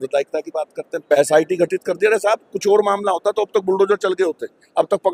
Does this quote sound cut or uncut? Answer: cut